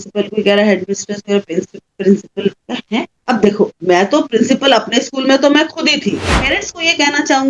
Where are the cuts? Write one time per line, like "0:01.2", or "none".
0:06.4